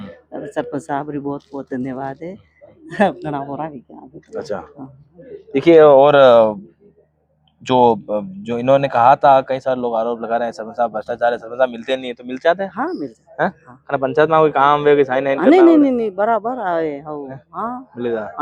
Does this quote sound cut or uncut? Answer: uncut